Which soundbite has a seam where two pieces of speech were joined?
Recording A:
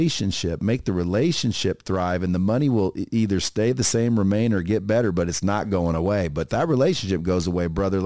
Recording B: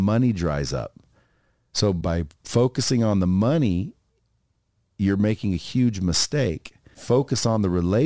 B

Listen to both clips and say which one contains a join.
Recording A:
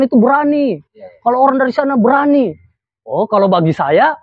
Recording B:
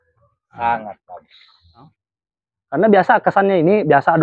B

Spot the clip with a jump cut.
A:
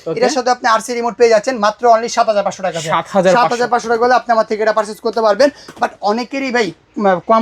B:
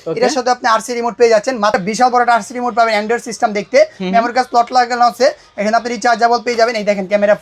B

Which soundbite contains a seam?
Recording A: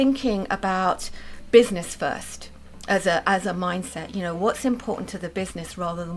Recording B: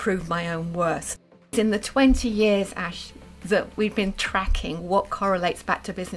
B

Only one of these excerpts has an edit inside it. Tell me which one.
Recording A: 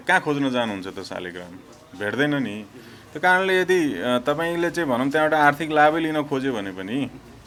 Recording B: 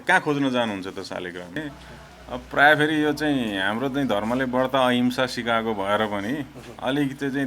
B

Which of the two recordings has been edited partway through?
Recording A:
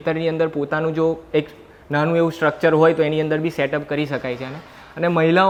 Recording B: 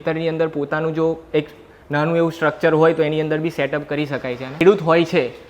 B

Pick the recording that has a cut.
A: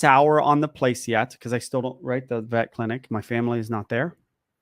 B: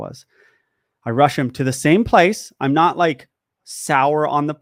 A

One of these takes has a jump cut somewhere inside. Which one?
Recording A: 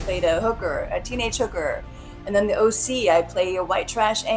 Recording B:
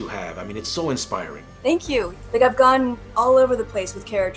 B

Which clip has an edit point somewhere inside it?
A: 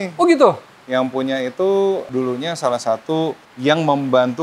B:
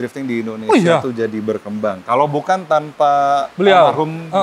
A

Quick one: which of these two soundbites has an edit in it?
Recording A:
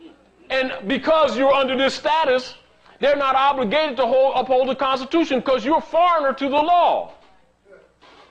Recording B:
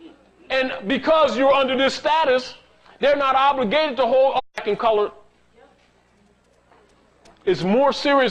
A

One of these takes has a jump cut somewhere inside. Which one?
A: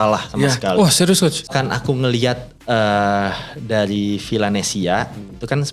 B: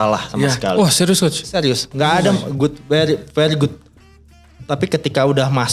A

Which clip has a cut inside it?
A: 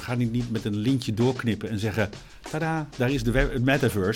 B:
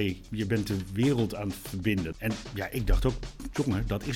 B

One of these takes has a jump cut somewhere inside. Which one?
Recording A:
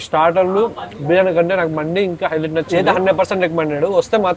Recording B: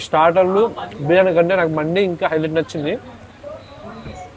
A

